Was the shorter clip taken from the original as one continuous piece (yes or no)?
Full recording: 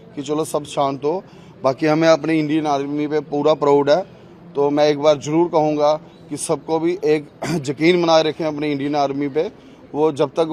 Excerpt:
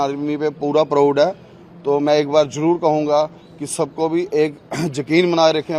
yes